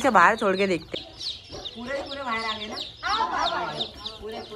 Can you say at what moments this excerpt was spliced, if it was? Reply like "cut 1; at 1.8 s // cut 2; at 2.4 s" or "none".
cut 1; at 1.0 s